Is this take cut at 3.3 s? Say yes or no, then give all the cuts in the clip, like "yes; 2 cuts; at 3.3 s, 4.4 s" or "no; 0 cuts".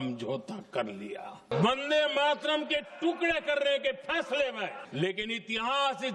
no; 2 cuts; at 1.5 s, 4.8 s